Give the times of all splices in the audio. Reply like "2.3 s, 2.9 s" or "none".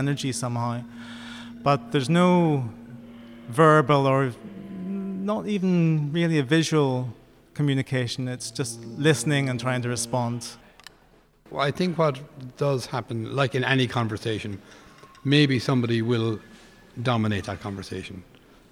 11.2 s